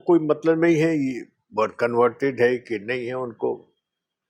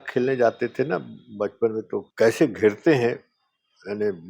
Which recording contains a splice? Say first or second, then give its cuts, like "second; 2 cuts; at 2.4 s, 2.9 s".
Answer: second; 1 cut; at 2.1 s